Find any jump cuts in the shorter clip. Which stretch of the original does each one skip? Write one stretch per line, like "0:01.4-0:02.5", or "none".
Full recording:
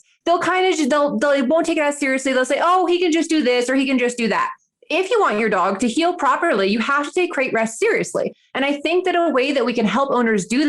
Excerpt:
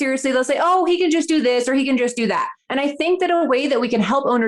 0:04.6-0:08.4